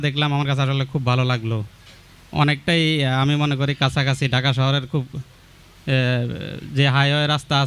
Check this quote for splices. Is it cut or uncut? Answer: uncut